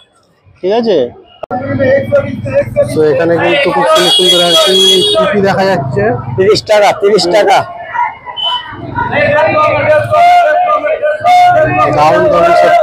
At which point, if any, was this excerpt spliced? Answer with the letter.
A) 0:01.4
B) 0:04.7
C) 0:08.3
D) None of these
A